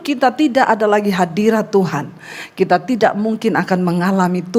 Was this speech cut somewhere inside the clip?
no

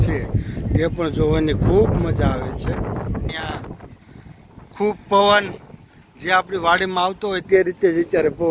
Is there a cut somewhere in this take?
yes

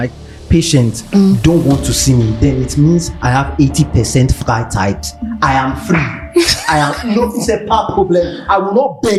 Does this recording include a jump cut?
no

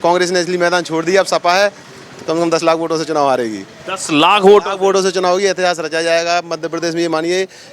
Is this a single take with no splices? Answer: yes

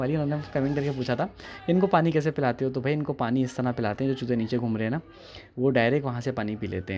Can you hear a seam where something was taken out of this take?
no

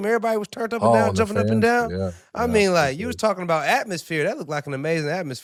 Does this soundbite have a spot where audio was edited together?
no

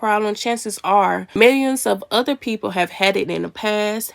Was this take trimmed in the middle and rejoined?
yes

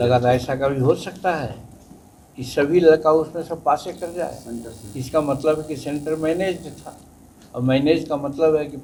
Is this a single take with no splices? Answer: yes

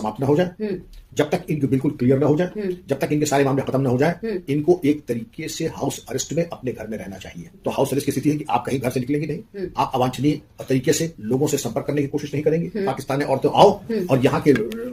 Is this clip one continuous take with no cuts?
no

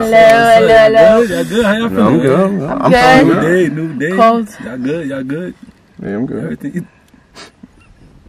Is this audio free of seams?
yes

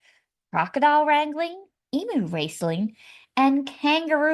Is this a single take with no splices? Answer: yes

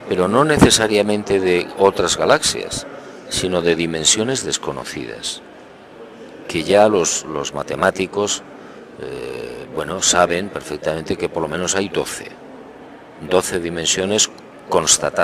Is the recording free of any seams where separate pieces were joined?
no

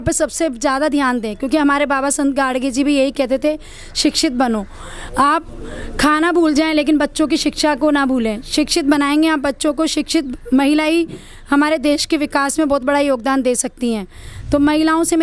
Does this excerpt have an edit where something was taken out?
no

